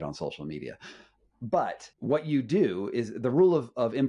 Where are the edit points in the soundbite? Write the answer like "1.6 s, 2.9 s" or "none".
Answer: 1.9 s